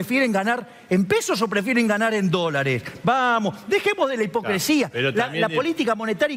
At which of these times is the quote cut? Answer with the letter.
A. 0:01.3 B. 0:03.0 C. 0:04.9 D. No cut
D